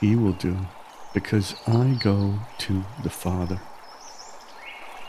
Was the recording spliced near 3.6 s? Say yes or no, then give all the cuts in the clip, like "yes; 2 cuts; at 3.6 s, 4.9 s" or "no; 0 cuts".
yes; 1 cut; at 3.6 s